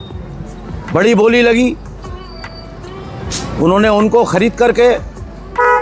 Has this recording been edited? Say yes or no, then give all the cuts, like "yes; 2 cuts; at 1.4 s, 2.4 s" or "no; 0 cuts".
no; 0 cuts